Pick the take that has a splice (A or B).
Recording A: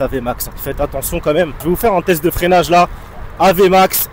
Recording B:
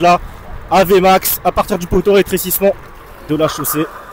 A